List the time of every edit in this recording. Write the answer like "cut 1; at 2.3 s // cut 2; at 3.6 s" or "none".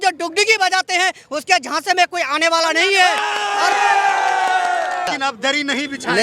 cut 1; at 5.1 s